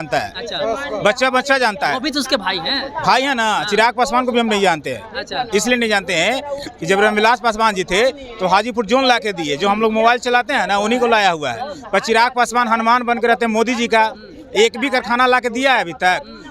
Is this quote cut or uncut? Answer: uncut